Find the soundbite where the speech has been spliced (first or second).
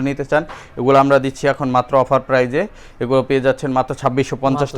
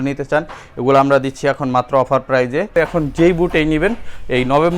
second